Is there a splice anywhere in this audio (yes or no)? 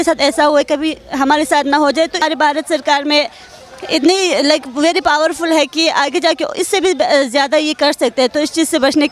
yes